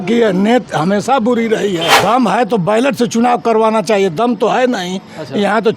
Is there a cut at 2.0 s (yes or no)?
yes